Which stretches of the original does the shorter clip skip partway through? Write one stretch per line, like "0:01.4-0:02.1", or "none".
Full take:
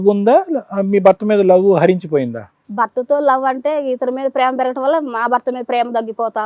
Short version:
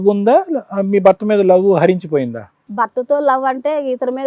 none